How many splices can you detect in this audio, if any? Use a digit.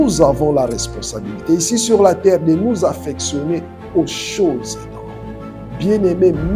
0